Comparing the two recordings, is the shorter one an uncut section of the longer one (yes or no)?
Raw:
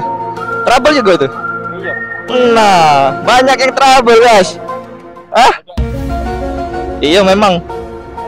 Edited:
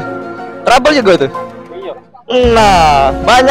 yes